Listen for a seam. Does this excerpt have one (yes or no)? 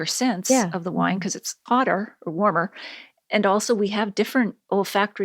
no